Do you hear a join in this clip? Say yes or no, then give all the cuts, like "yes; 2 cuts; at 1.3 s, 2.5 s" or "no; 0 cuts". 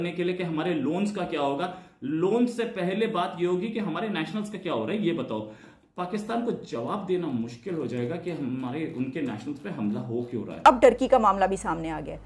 yes; 1 cut; at 10.4 s